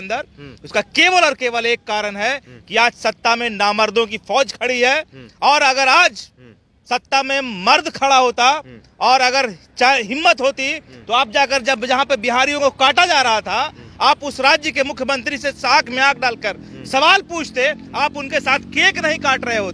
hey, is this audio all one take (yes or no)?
yes